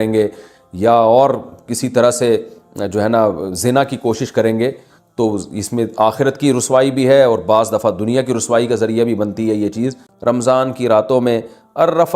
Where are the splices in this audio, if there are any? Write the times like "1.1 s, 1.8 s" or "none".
10.1 s